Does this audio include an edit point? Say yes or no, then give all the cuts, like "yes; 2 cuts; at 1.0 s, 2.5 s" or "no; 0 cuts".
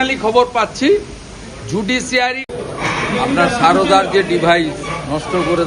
yes; 1 cut; at 2.4 s